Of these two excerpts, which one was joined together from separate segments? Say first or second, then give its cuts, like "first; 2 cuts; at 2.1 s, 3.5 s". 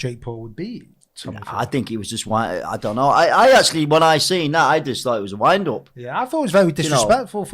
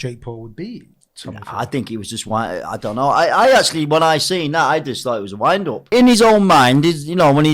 second; 1 cut; at 5.9 s